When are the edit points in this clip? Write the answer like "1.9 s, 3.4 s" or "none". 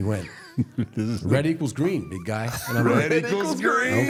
none

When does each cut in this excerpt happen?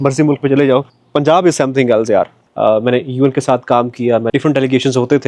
1.0 s, 2.4 s, 4.3 s

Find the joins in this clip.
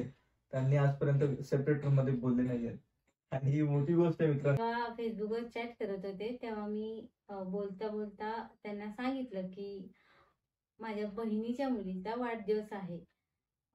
4.6 s

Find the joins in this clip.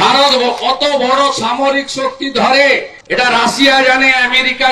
3.0 s

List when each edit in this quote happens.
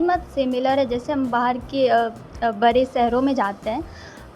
none

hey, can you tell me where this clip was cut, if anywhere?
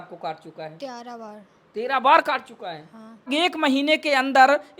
3.3 s

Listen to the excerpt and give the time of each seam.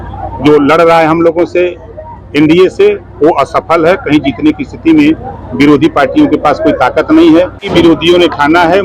7.6 s

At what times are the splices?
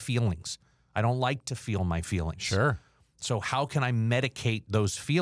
none

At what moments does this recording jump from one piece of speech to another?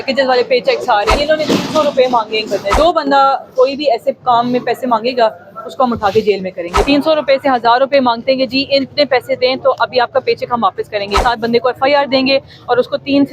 1.2 s, 2.8 s, 6.8 s, 11.2 s

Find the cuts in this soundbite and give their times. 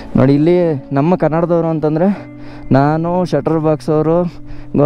none

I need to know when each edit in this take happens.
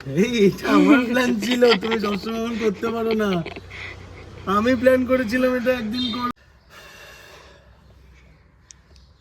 6.3 s

